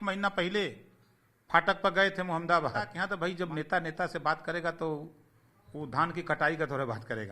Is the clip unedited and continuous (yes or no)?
no